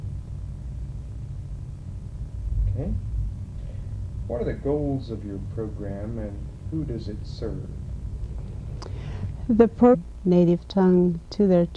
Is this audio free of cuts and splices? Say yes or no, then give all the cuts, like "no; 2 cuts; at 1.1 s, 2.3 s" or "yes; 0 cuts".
yes; 0 cuts